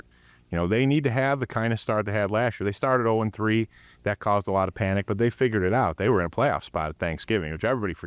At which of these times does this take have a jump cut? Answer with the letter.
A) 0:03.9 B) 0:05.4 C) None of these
C